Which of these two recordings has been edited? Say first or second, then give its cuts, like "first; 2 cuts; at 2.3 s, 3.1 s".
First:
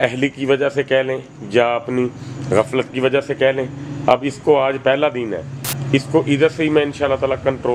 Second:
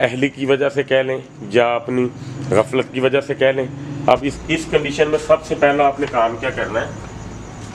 second; 1 cut; at 4.4 s